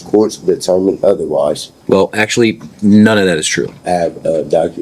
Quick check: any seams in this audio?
yes; 2 cuts; at 1.7 s, 3.8 s

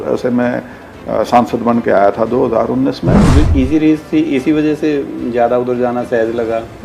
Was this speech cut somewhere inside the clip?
yes; 1 cut; at 3.2 s

